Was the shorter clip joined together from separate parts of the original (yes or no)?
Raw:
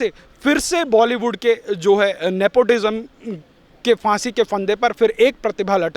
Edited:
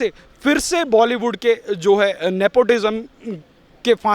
no